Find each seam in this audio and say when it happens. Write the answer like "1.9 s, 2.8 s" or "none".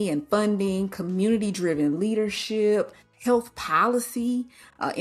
3.0 s